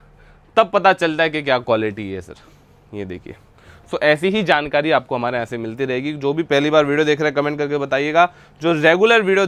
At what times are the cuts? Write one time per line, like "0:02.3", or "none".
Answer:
none